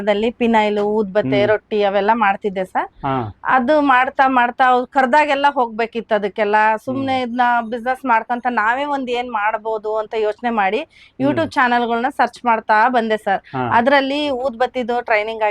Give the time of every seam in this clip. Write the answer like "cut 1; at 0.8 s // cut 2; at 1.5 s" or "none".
none